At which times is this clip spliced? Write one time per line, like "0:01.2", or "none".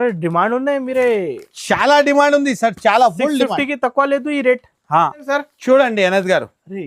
0:05.2